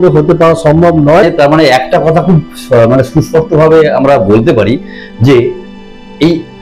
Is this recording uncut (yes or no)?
no